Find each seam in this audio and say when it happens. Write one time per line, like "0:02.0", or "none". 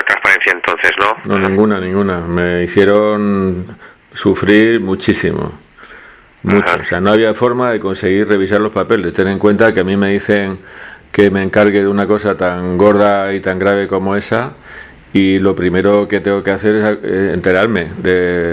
0:14.5